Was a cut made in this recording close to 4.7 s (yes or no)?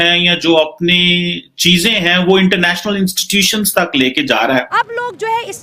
yes